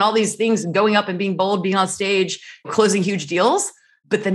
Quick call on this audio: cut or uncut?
cut